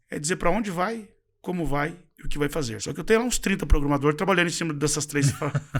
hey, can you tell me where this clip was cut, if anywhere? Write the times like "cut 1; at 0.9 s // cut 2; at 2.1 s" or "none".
cut 1; at 2.8 s